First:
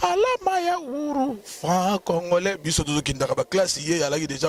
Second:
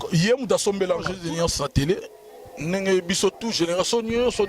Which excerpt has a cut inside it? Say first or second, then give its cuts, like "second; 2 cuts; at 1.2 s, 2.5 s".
second; 1 cut; at 1.1 s